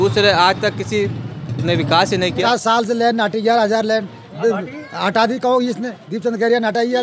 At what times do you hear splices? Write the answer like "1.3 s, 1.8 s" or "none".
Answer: 2.4 s

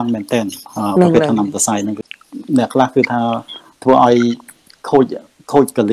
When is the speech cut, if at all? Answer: 2.0 s

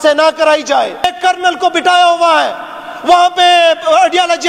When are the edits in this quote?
1.1 s

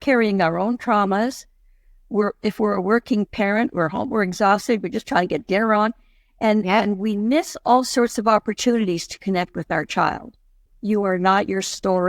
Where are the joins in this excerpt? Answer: 10.7 s

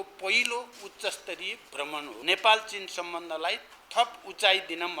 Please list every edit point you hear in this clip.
2.2 s

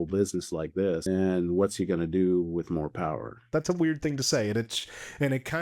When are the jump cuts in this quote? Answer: 1.0 s, 3.4 s

